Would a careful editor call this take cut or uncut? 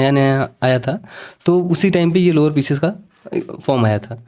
uncut